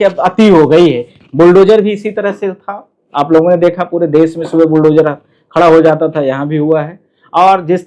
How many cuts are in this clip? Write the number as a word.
zero